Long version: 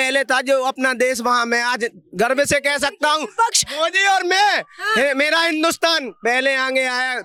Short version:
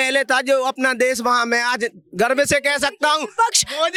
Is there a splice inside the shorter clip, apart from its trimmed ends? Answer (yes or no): no